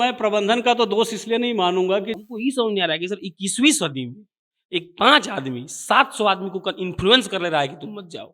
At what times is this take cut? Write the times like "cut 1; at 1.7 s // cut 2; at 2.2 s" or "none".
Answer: cut 1; at 2.2 s